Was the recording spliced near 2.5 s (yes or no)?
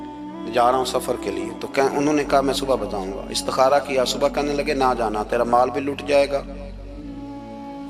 no